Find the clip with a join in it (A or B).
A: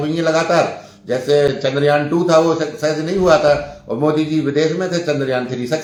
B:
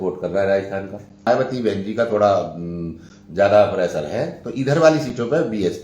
B